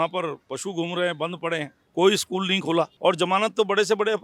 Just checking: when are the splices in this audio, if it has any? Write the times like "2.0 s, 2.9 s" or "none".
1.8 s, 2.9 s